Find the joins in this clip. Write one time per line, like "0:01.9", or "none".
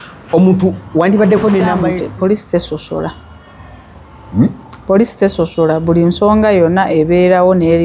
0:01.9